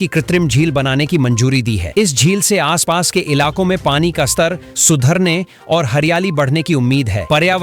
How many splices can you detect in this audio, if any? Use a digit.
0